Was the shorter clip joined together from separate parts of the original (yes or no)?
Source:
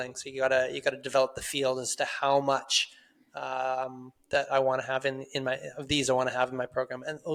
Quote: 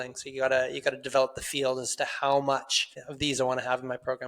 yes